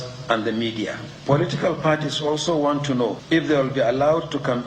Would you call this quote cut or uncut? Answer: cut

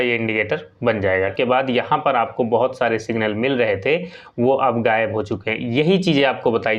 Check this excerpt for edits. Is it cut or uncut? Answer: cut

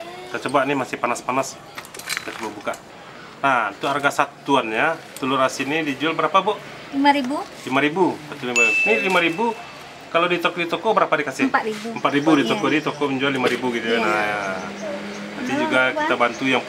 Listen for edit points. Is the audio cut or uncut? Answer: uncut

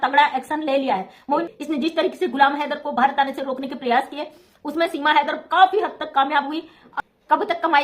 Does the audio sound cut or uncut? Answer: cut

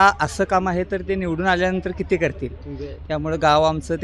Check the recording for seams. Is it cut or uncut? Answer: uncut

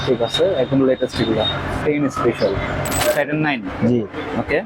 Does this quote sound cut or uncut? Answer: cut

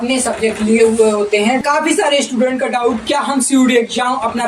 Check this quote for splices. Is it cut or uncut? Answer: cut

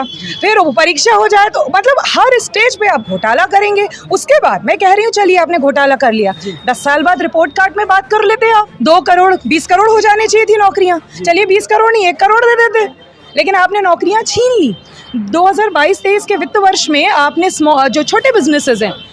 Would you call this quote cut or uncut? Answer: cut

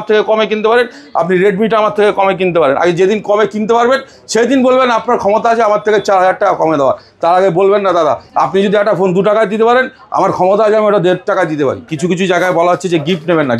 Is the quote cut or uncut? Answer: cut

